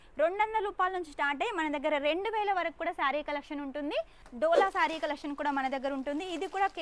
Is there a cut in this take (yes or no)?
yes